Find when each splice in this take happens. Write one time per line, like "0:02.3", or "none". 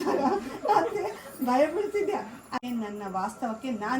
0:02.6